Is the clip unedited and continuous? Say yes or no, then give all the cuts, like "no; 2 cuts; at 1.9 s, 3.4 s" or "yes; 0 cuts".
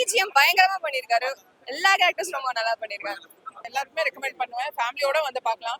no; 1 cut; at 3.7 s